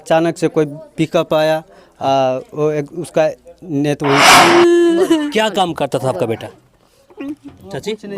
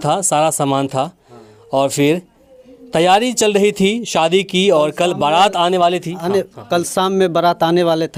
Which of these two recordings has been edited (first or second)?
first